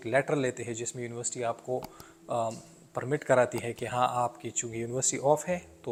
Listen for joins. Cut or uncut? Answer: uncut